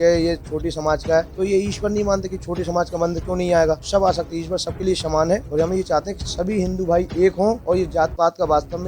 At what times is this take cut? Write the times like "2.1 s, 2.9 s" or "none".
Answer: 1.3 s, 3.8 s, 5.5 s, 7.6 s